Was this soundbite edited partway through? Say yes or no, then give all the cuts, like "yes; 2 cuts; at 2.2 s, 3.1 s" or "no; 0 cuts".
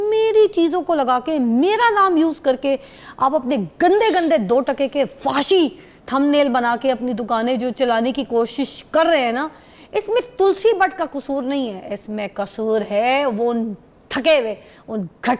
no; 0 cuts